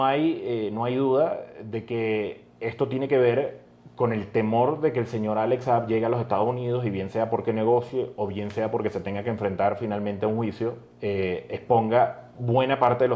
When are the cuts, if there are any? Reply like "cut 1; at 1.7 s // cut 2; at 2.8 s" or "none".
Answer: none